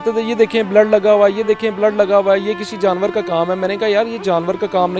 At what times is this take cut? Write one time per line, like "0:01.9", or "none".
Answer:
none